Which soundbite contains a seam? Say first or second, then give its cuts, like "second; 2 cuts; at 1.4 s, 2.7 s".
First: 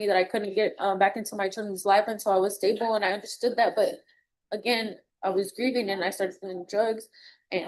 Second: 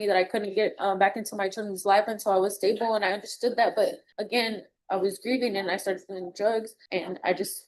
second; 2 cuts; at 4.1 s, 6.8 s